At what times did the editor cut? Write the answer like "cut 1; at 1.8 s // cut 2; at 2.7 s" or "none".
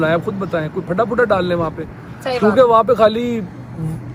none